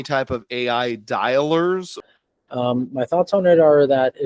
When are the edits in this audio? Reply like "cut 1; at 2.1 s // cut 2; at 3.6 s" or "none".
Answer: cut 1; at 1.9 s